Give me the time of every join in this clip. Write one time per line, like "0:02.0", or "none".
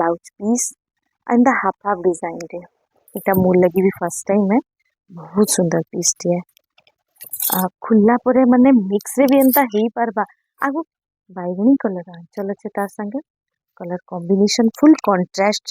0:10.8